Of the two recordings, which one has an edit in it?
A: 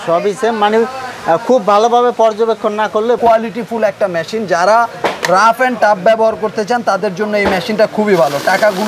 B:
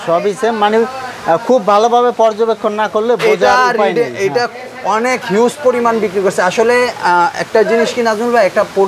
A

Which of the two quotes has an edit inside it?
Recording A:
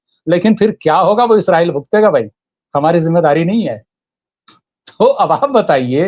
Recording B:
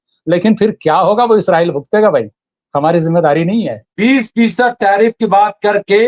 B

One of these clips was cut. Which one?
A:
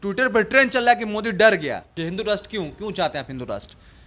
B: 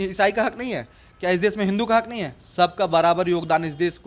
A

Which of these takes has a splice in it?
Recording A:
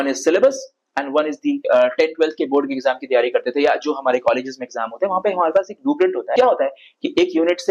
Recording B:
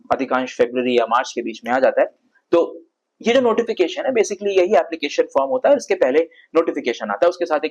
A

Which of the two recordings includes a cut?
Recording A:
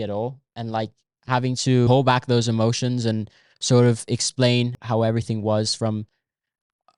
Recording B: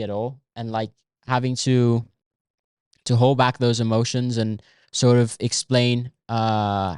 A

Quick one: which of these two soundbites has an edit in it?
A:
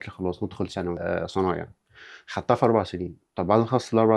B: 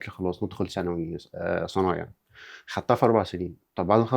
A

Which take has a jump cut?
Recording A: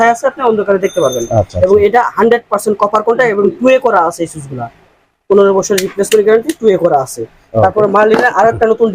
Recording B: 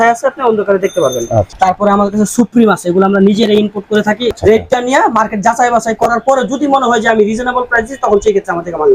B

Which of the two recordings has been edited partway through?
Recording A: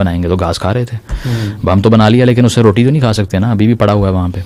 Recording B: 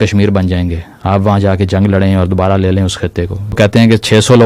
B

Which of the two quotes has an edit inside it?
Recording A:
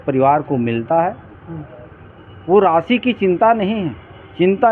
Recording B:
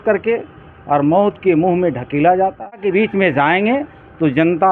B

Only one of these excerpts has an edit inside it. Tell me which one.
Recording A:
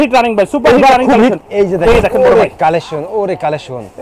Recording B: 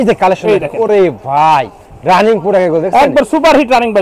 A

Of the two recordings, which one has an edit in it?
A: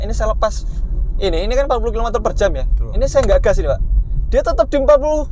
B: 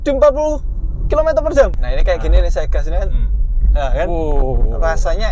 B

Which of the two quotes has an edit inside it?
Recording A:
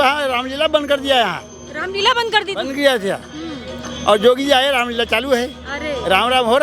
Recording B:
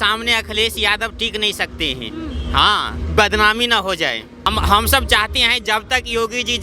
B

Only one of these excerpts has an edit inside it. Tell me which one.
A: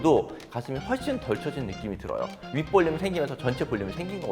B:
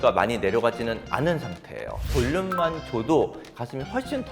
B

